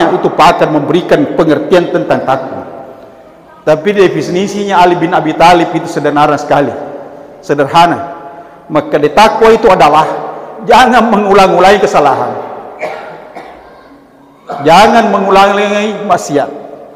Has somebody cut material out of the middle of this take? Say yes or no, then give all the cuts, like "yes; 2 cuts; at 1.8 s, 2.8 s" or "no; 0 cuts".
no; 0 cuts